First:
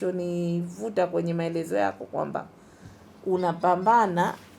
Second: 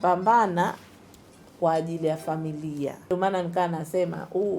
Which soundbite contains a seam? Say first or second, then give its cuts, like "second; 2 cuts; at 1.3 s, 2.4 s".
second; 1 cut; at 3.1 s